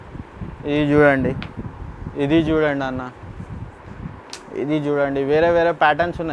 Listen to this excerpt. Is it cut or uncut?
uncut